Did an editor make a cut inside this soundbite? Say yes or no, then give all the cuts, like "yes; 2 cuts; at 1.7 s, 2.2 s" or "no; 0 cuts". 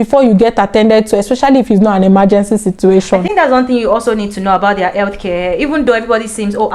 no; 0 cuts